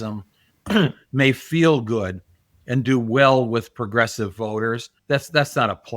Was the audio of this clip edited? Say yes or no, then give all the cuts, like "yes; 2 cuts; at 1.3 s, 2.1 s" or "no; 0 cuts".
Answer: yes; 1 cut; at 4.9 s